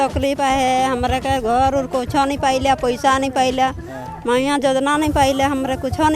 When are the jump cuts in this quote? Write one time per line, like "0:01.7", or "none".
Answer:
none